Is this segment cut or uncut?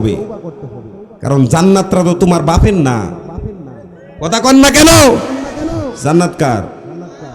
uncut